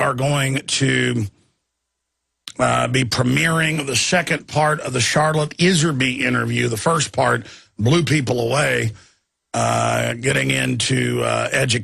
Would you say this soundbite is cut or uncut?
cut